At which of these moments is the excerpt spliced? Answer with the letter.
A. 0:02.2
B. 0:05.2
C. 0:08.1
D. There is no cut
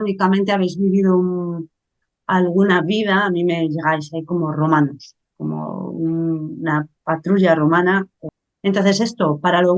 C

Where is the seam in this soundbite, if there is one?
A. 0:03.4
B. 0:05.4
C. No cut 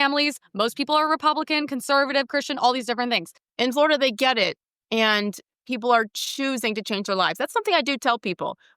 A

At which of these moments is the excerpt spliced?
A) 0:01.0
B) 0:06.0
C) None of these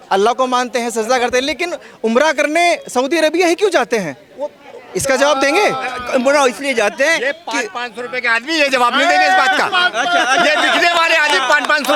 C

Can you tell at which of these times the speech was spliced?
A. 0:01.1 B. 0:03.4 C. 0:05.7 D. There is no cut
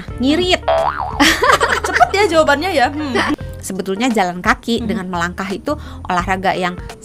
B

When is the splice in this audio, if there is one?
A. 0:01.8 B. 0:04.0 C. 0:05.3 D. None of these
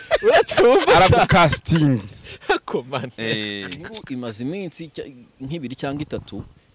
B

